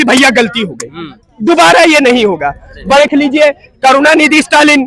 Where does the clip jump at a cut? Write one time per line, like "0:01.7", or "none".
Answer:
0:03.0